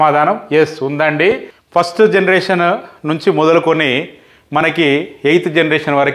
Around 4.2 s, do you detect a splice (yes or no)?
no